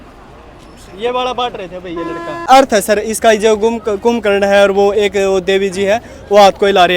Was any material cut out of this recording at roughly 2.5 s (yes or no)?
yes